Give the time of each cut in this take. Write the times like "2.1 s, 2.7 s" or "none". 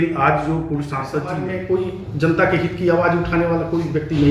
1.3 s